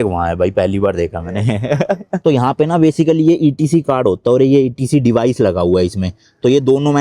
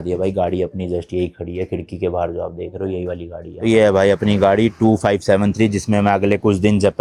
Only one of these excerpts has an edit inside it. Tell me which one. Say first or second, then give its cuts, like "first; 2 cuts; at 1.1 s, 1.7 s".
first; 1 cut; at 2.2 s